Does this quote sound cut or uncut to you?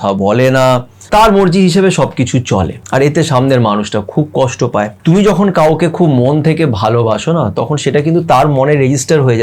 cut